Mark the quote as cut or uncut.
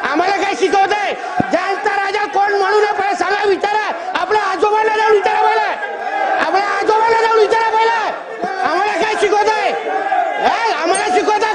uncut